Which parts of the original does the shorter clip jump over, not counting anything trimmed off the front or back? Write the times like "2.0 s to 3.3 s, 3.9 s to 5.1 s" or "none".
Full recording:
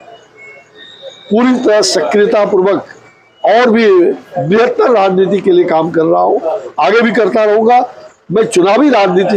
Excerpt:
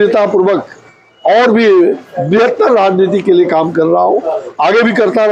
none

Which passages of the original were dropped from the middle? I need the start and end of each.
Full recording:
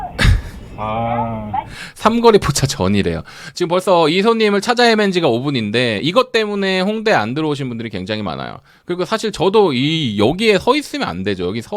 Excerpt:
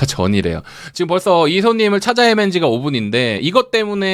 none

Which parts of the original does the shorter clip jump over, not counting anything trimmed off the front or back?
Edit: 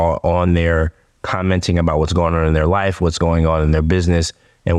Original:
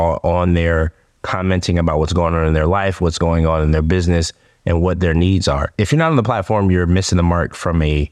none

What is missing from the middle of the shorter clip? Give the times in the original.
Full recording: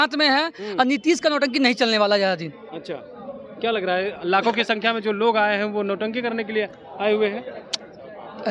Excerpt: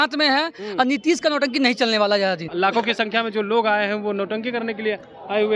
2.5 s to 4.2 s

